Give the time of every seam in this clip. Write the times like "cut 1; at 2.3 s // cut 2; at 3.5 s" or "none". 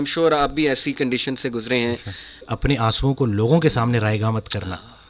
cut 1; at 2.5 s